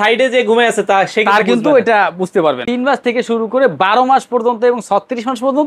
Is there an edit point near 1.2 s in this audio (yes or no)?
no